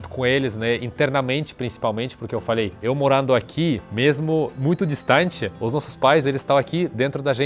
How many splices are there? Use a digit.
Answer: 0